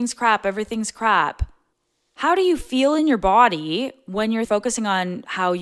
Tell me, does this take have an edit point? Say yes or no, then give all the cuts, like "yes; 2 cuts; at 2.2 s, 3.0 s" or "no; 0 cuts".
yes; 1 cut; at 4.5 s